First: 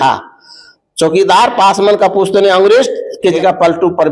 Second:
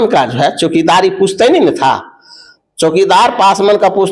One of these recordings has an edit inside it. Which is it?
first; 1 cut; at 3.2 s

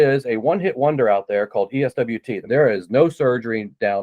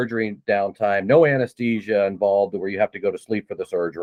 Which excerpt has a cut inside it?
first; 1 cut; at 2.3 s

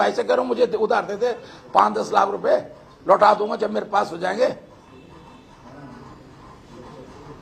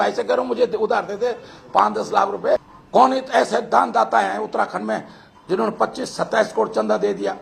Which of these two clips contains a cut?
second; 1 cut; at 2.8 s

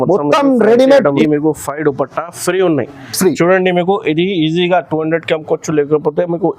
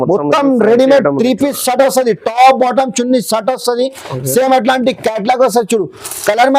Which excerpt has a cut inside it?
first; 1 cut; at 1.2 s

